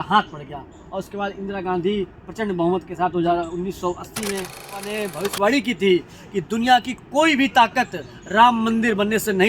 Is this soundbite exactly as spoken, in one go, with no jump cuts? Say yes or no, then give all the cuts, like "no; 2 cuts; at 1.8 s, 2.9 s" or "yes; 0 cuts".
no; 1 cut; at 5.0 s